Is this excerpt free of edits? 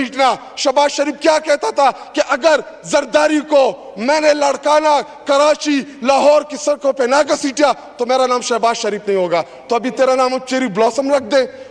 yes; 0 cuts

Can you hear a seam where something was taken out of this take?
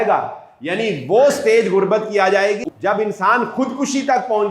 yes; 1 cut; at 2.6 s

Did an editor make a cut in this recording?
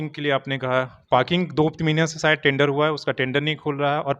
no; 0 cuts

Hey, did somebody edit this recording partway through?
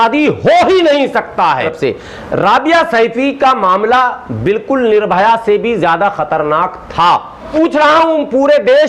yes; 2 cuts; at 1.6 s, 7.5 s

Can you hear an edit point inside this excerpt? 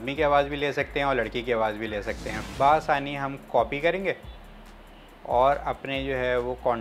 yes; 1 cut; at 2.4 s

